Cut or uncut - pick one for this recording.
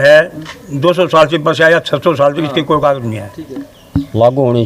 cut